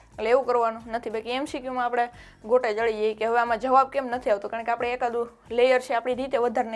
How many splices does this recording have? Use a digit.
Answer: 0